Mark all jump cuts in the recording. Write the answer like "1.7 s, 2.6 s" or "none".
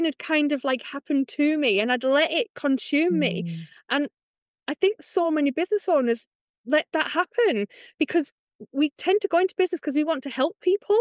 8.9 s